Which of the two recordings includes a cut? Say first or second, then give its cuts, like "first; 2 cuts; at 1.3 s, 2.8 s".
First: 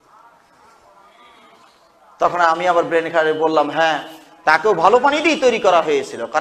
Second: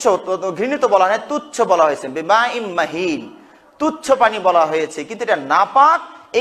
first; 1 cut; at 2.5 s